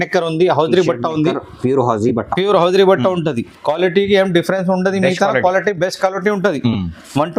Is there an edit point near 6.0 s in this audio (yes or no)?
no